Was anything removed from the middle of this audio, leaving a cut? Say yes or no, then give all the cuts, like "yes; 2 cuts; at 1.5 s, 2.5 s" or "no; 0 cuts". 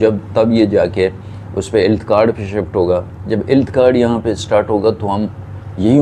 no; 0 cuts